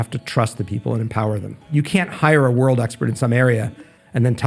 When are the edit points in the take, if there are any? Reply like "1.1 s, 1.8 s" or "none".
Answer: none

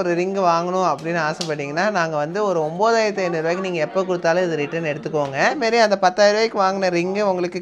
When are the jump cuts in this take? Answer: 5.6 s

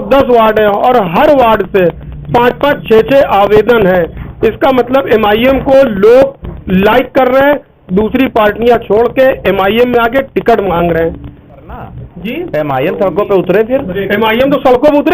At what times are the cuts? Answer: 11.4 s

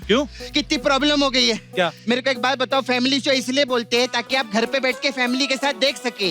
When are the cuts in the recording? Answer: 2.0 s

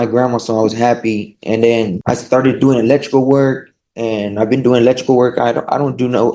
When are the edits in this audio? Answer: 2.0 s

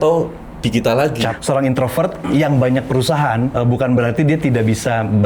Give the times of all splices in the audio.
1.4 s, 3.5 s

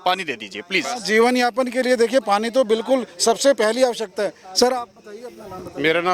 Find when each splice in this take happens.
none

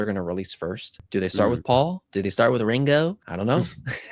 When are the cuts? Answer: 0.9 s, 2.0 s, 3.3 s

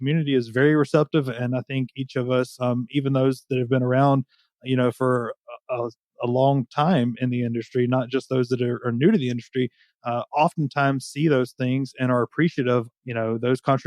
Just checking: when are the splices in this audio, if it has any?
12.9 s

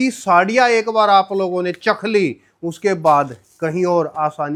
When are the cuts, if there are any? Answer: none

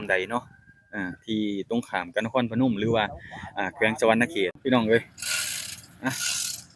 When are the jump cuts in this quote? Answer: 4.6 s

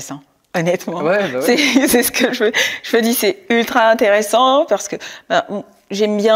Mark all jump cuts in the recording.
none

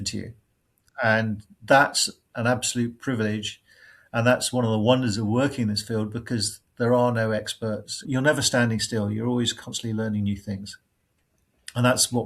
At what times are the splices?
8.1 s

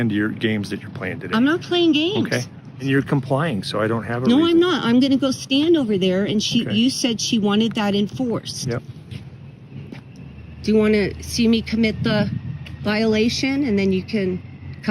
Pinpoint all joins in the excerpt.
2.7 s

